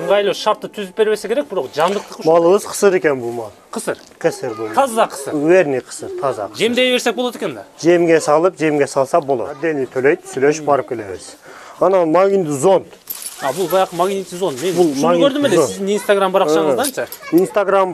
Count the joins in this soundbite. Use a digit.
1